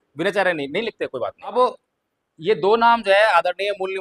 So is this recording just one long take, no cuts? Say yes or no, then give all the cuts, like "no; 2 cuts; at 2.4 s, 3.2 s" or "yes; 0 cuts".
no; 1 cut; at 1.5 s